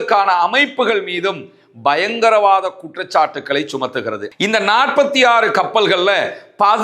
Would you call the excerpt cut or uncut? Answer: cut